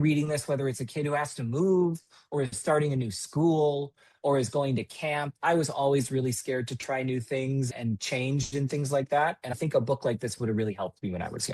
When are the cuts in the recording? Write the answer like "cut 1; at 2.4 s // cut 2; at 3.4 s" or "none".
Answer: cut 1; at 7.7 s // cut 2; at 9.5 s